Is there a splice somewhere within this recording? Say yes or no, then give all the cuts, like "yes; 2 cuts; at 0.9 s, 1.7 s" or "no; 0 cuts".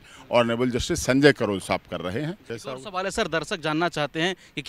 yes; 1 cut; at 2.5 s